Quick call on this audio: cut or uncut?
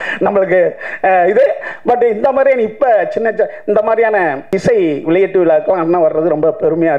cut